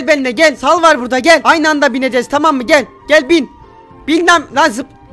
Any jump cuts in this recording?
no; 0 cuts

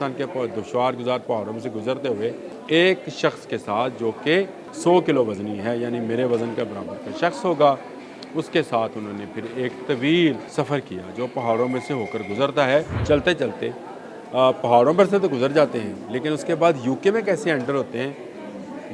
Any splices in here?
yes; 4 cuts; at 2.5 s, 4.6 s, 10.5 s, 12.9 s

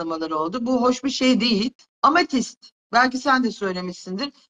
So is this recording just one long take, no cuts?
no; 1 cut; at 1.8 s

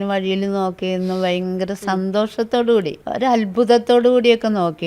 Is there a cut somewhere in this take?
yes; 1 cut; at 3.0 s

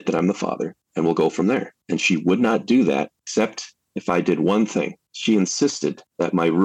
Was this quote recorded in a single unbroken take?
yes; 0 cuts

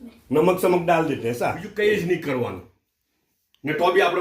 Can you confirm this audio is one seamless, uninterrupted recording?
no; 1 cut; at 1.6 s

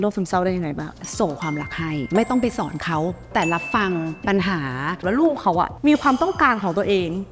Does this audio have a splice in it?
yes; 4 cuts; at 1.0 s, 2.0 s, 3.3 s, 5.0 s

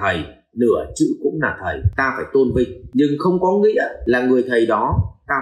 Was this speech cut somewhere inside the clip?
yes; 3 cuts; at 1.8 s, 2.8 s, 3.9 s

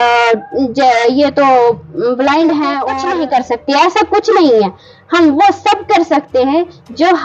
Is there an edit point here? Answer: yes; 1 cut; at 2.9 s

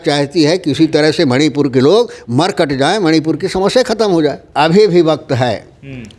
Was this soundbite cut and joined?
yes; 1 cut; at 4.4 s

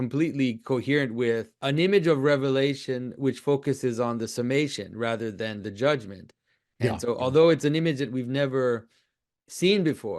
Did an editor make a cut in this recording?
yes; 1 cut; at 1.6 s

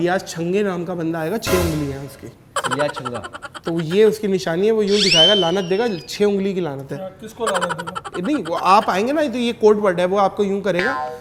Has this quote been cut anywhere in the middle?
no; 0 cuts

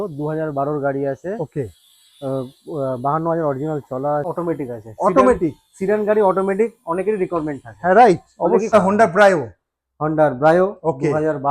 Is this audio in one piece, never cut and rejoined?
no; 2 cuts; at 4.3 s, 8.7 s

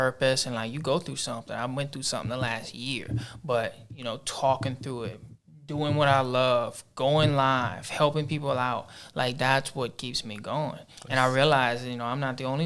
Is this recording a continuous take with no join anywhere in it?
yes; 0 cuts

